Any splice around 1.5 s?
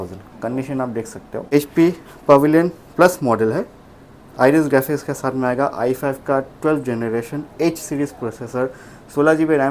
yes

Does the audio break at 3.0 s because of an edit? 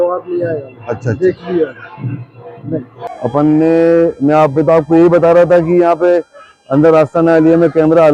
yes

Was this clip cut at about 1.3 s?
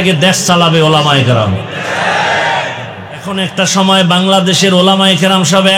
no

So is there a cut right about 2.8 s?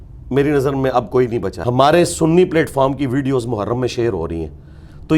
no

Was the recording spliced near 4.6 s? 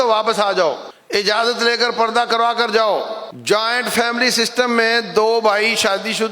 no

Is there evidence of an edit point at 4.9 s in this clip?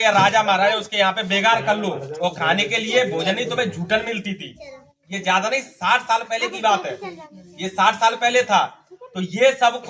no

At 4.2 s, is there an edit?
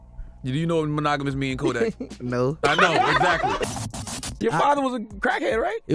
yes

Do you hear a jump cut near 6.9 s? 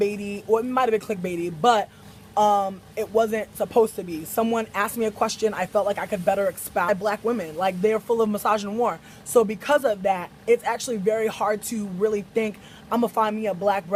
no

